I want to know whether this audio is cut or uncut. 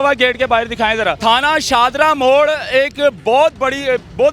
cut